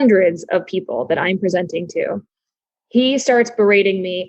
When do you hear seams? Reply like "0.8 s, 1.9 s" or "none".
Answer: none